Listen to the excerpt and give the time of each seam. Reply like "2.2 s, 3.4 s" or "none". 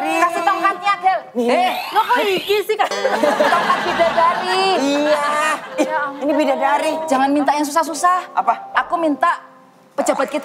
7.0 s

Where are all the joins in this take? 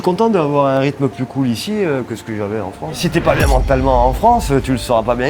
2.9 s

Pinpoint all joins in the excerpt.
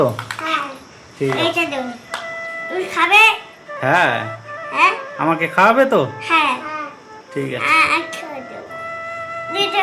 2.0 s

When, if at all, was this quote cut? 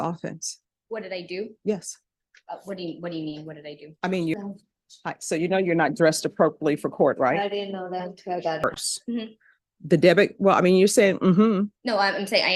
4.3 s, 8.6 s

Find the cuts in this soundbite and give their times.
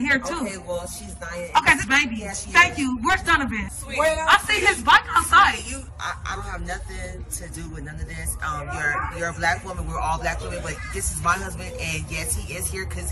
2.4 s, 3.6 s, 5.9 s

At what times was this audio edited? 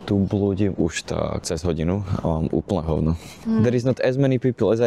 1.4 s, 3.4 s

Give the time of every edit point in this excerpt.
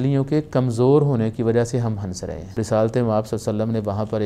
2.6 s

